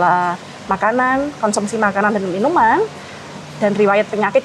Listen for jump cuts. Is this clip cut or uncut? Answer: uncut